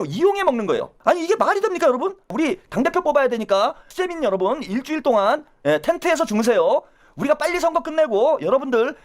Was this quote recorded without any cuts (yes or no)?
no